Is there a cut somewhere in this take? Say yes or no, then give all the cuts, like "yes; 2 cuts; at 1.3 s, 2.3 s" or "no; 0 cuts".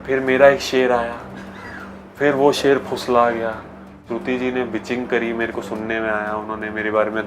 yes; 1 cut; at 4.0 s